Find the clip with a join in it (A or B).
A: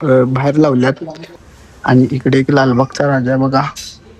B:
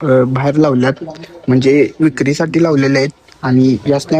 A